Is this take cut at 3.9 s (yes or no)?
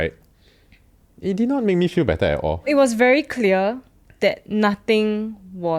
no